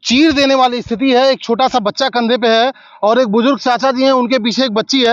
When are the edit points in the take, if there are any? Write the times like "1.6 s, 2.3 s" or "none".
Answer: none